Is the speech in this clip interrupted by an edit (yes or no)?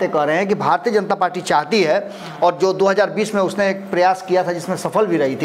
no